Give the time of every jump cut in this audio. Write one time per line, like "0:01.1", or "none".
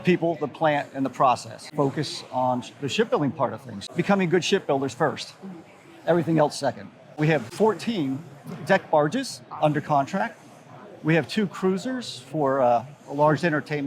0:01.7
0:07.2

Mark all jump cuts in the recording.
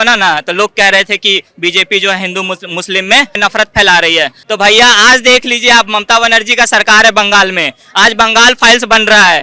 0:03.3
0:04.4

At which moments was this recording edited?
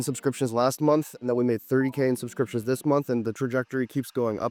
none

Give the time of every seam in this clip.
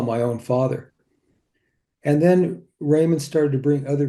0:01.6

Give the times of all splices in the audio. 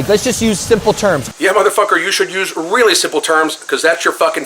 0:01.2

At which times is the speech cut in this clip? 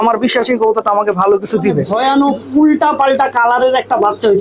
0:01.9

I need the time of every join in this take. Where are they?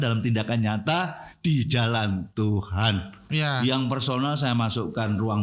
0:03.3

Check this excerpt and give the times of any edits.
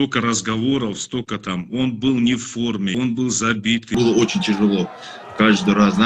0:02.9
0:04.0

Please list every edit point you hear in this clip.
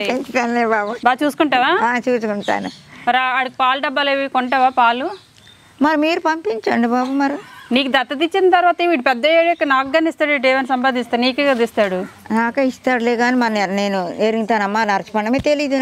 0:00.9

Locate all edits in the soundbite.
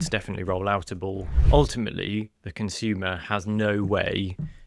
0:01.3

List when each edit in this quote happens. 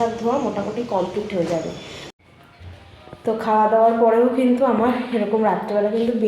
0:02.1

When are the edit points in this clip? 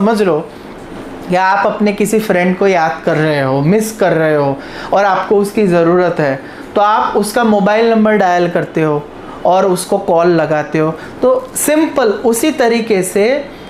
none

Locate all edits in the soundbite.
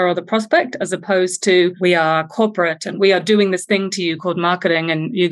0:01.8
0:02.9

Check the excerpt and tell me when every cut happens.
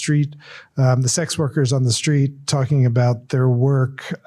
none

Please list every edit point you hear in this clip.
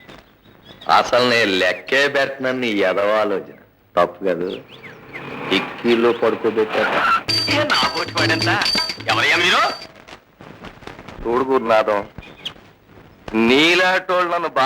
0:07.3

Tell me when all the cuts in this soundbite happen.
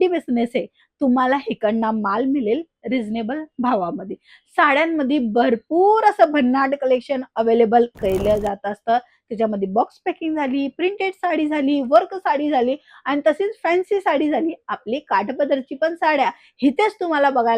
none

